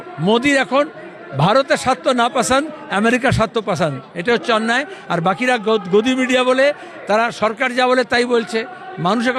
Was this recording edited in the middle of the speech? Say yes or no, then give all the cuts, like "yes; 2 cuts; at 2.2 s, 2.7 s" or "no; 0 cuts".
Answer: no; 0 cuts